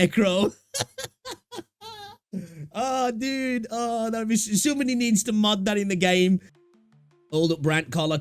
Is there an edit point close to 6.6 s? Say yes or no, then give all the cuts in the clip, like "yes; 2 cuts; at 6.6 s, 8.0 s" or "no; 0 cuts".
yes; 1 cut; at 6.6 s